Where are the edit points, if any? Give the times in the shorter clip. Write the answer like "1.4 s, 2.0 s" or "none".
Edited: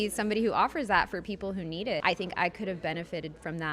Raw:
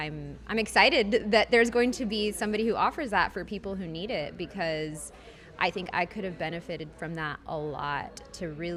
2.0 s